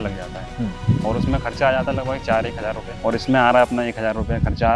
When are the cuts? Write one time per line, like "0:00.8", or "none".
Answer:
0:03.0